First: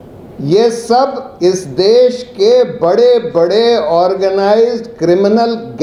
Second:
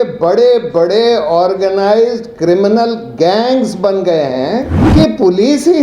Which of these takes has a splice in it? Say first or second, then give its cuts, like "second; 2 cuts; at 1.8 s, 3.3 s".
second; 1 cut; at 4.8 s